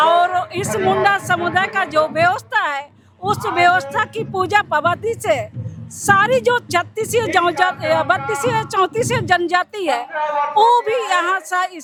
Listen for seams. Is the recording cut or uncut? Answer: uncut